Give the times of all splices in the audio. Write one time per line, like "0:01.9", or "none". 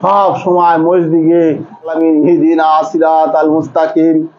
0:01.9